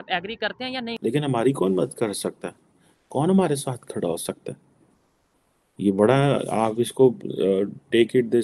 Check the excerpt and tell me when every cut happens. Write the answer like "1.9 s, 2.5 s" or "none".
0.9 s